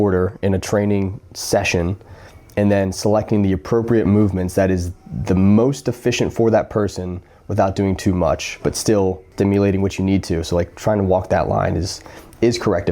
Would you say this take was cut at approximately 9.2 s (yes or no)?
yes